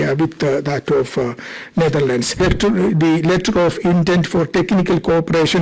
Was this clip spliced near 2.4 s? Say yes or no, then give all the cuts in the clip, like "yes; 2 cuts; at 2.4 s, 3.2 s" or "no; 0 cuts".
yes; 1 cut; at 2.4 s